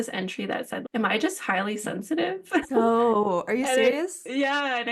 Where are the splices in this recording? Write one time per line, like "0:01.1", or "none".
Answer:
none